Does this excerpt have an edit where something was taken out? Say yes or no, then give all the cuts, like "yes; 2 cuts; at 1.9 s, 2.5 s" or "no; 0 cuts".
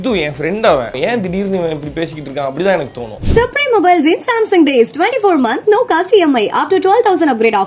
yes; 2 cuts; at 1.0 s, 3.2 s